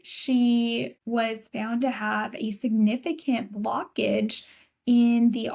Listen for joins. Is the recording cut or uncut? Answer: cut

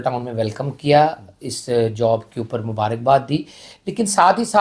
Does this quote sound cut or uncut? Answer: uncut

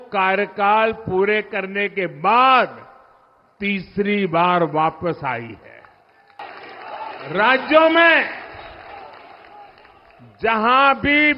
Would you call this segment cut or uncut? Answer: cut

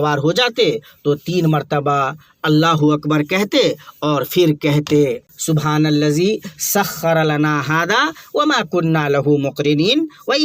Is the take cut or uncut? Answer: cut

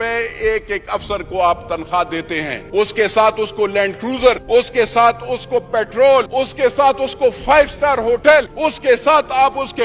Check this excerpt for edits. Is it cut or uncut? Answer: cut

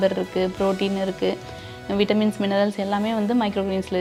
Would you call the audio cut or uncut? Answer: uncut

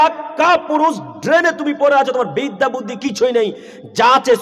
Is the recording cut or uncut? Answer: uncut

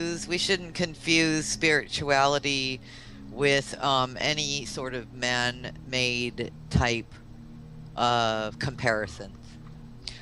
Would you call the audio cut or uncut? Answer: cut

